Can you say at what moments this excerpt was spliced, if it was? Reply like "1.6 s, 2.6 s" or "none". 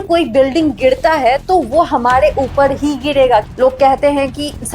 3.5 s

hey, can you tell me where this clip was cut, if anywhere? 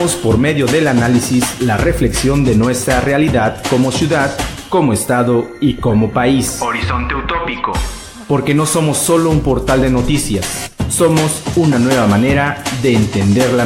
none

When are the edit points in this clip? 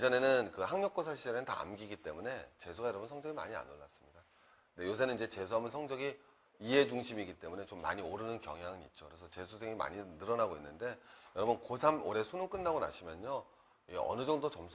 11.4 s

